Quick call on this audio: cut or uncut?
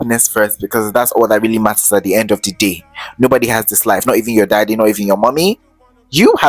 uncut